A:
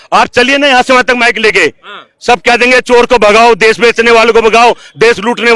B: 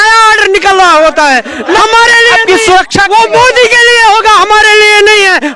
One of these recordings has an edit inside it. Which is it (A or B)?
B